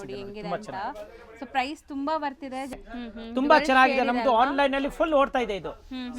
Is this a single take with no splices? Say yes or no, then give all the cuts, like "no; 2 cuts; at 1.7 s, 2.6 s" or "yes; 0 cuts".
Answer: no; 1 cut; at 2.7 s